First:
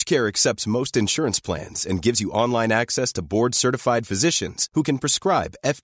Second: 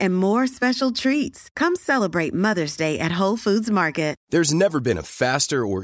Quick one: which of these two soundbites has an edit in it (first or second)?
second